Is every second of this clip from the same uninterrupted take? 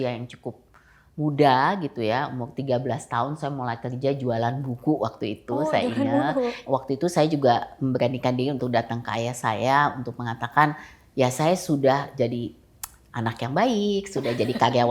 no; 1 cut; at 6.6 s

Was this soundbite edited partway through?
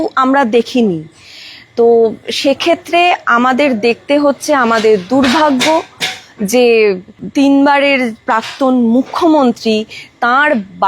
yes; 1 cut; at 7.1 s

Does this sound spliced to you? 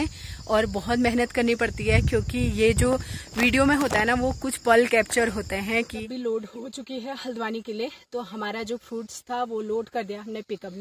yes; 1 cut; at 6.0 s

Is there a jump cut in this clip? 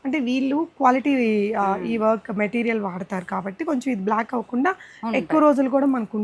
no; 0 cuts

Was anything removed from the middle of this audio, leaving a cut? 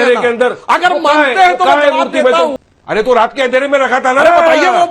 yes; 1 cut; at 2.6 s

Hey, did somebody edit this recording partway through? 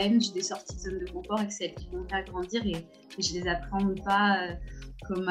no; 0 cuts

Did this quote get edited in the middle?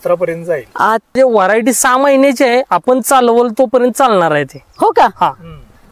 yes; 1 cut; at 1.2 s

